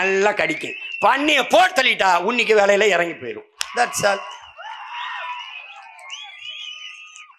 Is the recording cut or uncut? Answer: uncut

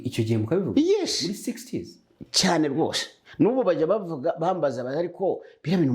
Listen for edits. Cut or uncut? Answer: uncut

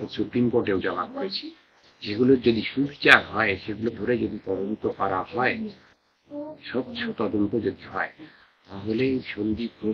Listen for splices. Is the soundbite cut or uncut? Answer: uncut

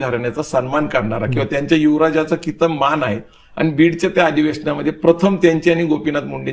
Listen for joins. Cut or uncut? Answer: uncut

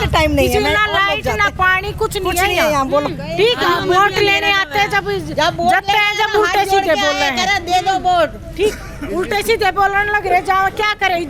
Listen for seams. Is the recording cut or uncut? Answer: uncut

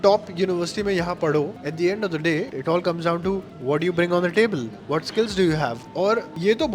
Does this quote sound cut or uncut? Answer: cut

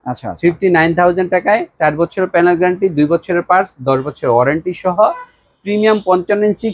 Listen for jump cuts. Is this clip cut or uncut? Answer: uncut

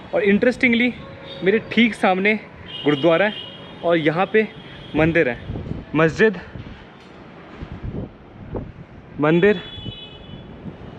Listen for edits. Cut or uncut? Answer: uncut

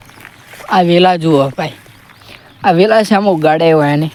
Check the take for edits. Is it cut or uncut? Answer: uncut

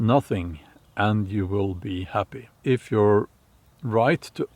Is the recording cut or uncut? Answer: cut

